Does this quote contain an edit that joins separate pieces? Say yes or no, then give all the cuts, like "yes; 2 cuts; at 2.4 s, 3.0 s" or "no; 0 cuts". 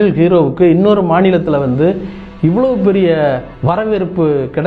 yes; 1 cut; at 3.5 s